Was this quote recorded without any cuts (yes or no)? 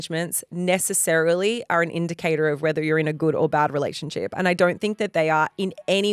yes